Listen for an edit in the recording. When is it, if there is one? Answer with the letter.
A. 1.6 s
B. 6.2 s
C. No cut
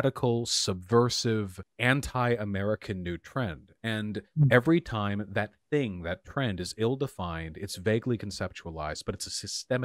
A